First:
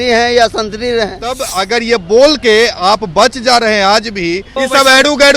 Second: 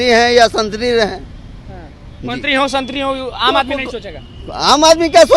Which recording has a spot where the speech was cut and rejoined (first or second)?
first